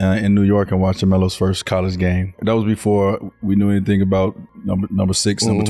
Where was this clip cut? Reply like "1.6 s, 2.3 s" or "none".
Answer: 2.4 s